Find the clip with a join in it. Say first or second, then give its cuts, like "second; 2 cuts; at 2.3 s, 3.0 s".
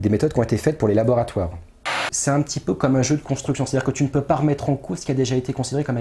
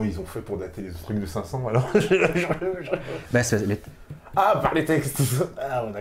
first; 1 cut; at 2.1 s